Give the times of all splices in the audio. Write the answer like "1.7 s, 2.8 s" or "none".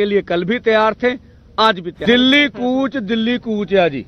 1.9 s